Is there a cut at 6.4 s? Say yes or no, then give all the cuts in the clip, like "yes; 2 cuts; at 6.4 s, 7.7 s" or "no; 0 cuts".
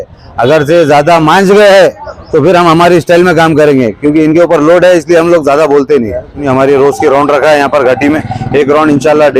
yes; 1 cut; at 6.4 s